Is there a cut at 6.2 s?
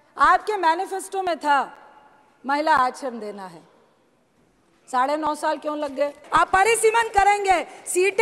yes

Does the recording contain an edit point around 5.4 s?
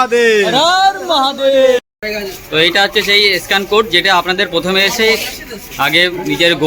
no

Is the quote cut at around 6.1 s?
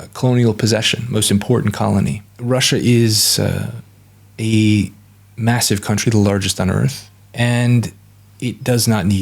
no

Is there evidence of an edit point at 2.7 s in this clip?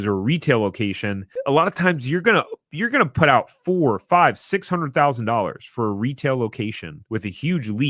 no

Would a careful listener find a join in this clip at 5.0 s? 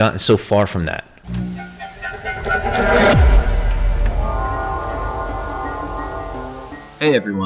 no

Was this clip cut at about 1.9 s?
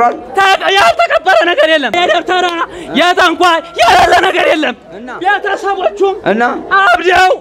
yes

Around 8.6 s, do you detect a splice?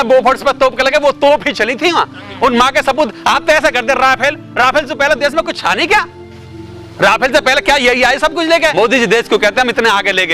yes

